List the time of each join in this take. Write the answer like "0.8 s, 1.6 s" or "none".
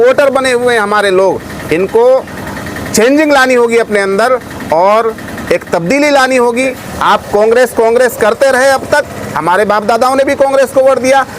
6.9 s